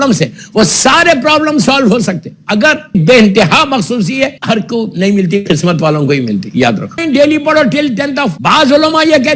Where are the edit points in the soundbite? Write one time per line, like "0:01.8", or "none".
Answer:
0:03.0
0:04.4
0:07.0
0:08.4